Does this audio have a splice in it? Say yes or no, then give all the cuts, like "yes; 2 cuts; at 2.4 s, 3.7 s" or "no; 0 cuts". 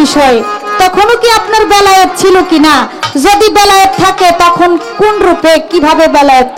no; 0 cuts